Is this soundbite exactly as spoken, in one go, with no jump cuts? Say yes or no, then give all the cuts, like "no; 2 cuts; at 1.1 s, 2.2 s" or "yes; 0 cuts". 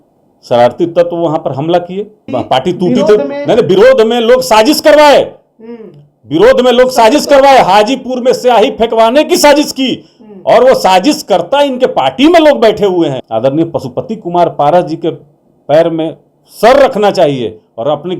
no; 2 cuts; at 2.2 s, 13.2 s